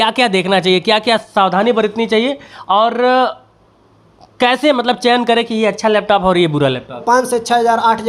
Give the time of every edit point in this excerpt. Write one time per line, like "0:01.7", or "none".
0:07.0